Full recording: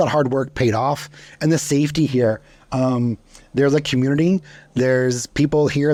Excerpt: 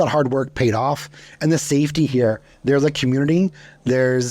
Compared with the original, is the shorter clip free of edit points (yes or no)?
no